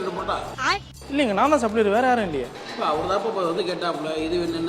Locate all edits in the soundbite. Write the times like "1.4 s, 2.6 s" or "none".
0.9 s, 2.6 s